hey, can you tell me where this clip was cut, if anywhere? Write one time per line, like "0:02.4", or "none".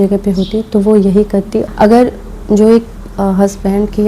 0:01.7